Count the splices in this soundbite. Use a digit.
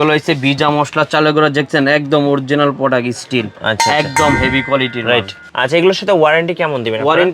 1